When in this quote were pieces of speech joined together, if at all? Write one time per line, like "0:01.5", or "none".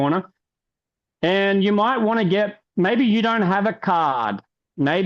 0:04.1

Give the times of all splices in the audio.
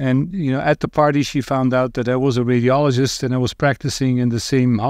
none

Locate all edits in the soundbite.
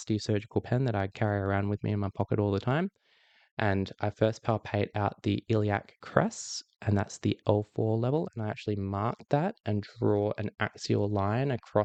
none

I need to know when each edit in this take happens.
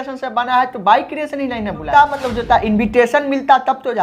0:01.9

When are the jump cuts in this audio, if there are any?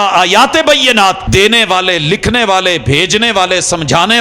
0:01.2

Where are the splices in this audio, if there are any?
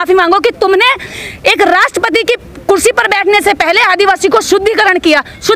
none

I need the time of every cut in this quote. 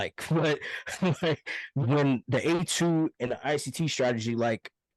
0:01.8

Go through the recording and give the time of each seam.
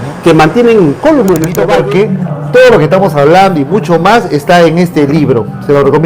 0:01.6

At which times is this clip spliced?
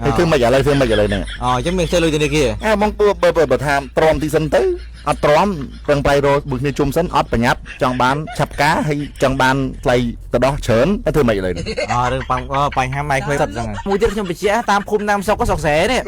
0:01.3
0:02.9
0:08.3
0:13.9

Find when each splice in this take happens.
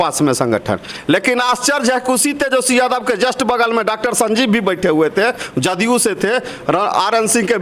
none

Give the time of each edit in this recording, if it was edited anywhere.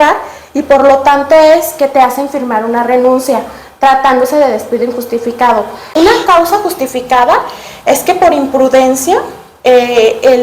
0:06.0

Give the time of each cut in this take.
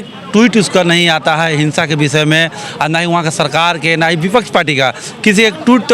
none

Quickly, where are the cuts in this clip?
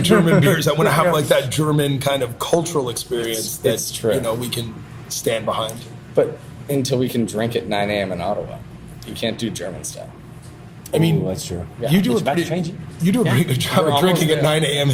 none

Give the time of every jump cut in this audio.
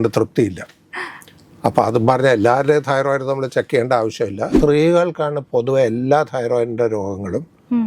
0:04.5

